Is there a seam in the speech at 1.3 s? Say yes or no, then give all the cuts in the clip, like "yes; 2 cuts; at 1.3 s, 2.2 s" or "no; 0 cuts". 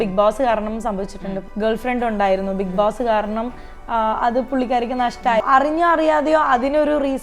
yes; 2 cuts; at 1.3 s, 5.4 s